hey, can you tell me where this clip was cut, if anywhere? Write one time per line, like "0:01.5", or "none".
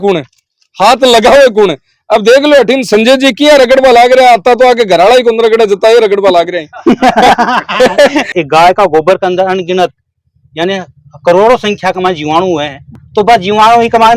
0:08.3
0:12.9